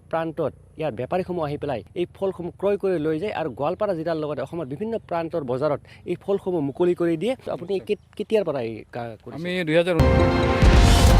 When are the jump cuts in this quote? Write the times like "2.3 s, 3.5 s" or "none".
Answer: 10.0 s